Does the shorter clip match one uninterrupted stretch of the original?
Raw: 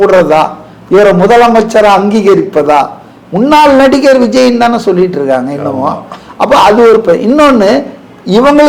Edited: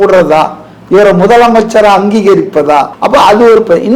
no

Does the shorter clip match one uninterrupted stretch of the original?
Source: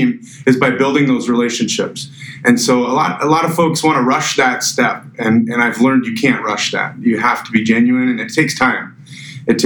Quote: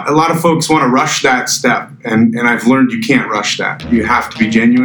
yes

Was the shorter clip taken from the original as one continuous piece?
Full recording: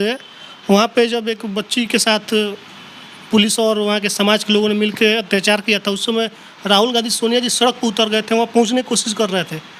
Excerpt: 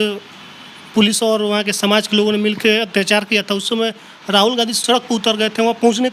no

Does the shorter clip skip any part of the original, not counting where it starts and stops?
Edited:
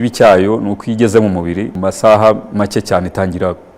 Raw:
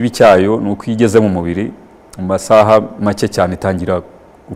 yes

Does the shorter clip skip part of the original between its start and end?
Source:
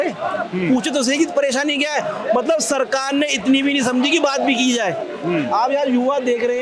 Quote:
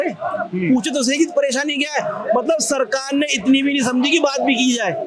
no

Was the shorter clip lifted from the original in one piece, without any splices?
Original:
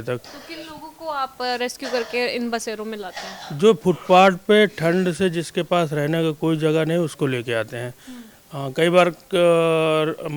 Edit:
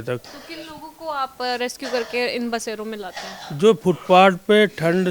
yes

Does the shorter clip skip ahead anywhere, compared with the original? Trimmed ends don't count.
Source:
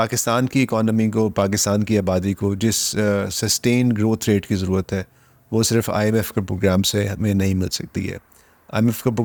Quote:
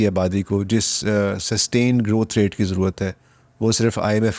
no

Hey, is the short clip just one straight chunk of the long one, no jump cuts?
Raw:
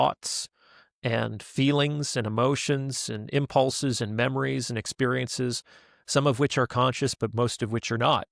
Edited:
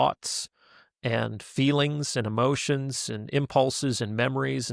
yes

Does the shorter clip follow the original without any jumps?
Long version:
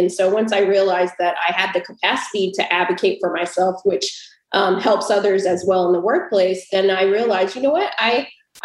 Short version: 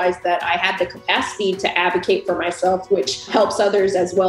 no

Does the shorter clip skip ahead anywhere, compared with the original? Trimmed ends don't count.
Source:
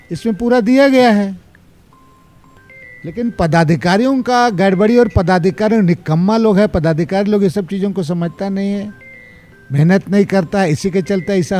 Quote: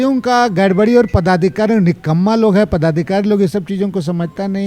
no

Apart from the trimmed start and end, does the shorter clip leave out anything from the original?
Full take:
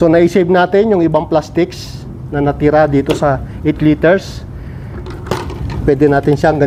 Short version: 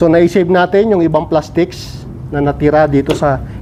no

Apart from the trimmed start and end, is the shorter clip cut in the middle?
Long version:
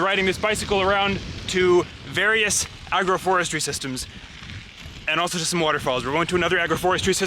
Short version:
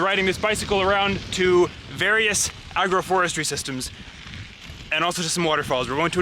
yes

